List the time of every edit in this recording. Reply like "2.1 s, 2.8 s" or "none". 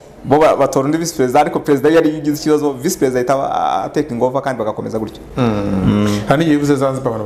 none